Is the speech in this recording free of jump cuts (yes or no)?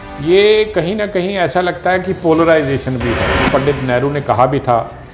no